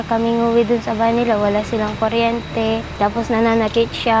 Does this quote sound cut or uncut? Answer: cut